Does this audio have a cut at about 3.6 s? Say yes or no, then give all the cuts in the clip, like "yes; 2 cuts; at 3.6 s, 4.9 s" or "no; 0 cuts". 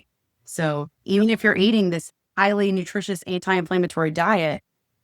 no; 2 cuts; at 1.0 s, 2.1 s